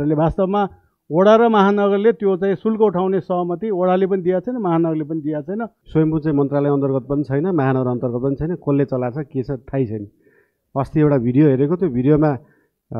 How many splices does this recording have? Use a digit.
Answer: 1